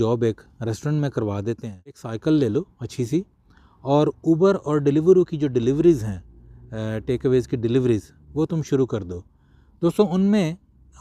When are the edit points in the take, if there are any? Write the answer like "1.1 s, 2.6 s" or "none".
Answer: 2.1 s